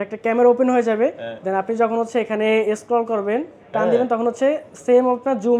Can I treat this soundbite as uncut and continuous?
yes; 0 cuts

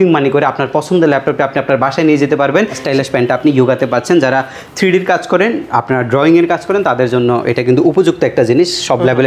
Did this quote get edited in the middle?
yes; 1 cut; at 2.8 s

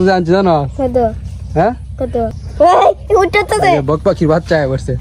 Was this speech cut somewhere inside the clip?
yes; 1 cut; at 2.4 s

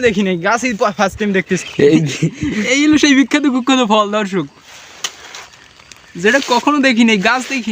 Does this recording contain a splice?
yes; 1 cut; at 1.7 s

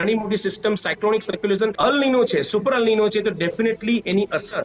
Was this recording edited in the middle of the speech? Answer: yes; 1 cut; at 1.7 s

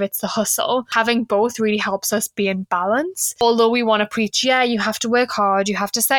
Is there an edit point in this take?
yes; 2 cuts; at 0.9 s, 3.4 s

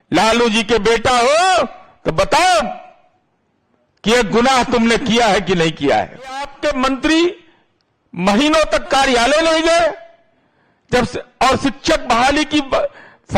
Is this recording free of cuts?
no; 1 cut; at 6.5 s

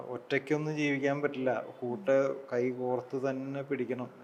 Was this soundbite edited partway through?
no; 0 cuts

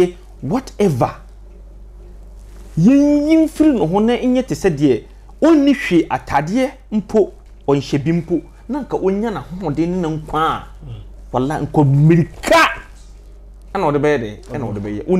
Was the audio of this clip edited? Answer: no; 0 cuts

